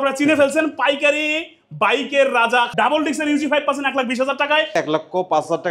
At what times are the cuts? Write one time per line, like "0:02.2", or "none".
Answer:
0:02.7
0:04.8

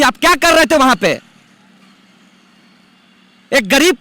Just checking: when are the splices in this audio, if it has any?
none

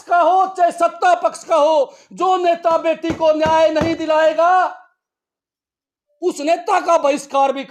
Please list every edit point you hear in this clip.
none

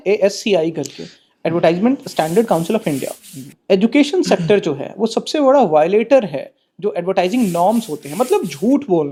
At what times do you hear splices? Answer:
none

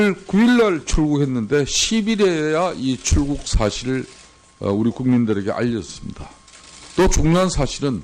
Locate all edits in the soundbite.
0:05.1

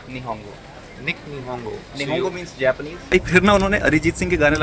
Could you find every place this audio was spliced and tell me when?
0:03.1

